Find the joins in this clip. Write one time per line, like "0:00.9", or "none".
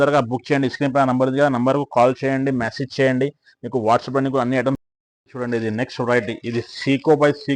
0:04.8